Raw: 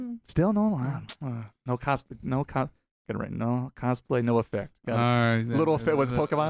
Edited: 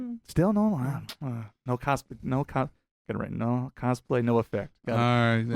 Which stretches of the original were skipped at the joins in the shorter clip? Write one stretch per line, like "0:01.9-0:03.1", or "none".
none